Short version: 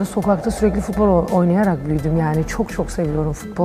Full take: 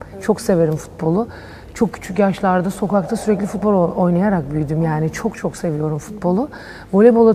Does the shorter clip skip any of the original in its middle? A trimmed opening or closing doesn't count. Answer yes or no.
no